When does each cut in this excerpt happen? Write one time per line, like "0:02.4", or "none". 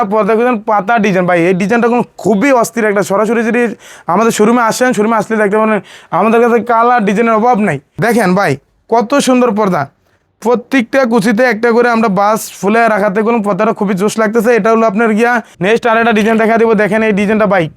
0:07.9
0:15.5